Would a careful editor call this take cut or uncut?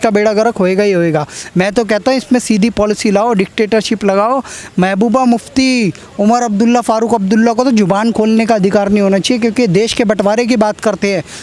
uncut